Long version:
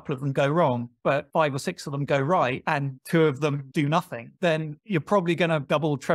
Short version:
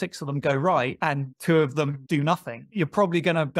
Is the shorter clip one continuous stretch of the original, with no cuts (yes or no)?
no